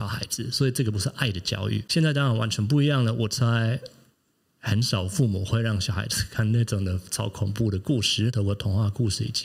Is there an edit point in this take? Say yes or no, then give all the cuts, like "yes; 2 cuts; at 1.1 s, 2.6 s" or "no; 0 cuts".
yes; 2 cuts; at 1.9 s, 8.3 s